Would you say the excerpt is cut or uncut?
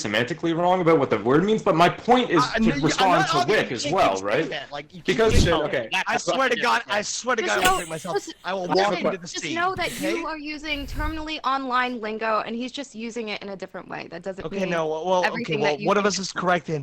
cut